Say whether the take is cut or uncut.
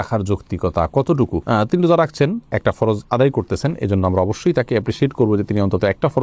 uncut